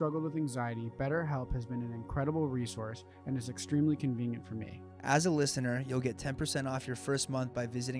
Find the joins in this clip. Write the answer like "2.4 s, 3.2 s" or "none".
none